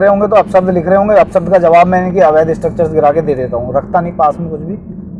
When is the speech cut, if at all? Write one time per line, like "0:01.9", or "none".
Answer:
none

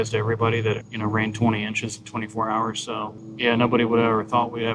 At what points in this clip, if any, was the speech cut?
0:00.9
0:03.2

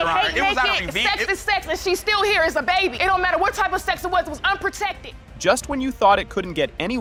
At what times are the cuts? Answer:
none

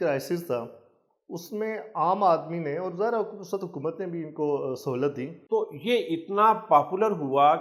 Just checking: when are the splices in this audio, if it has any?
0:05.4

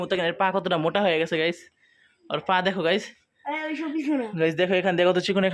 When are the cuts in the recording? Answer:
none

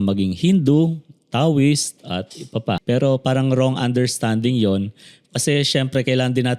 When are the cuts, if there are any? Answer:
0:02.8

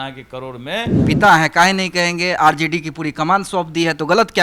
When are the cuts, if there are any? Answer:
0:01.0

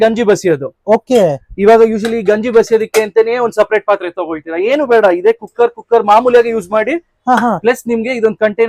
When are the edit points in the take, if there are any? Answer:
none

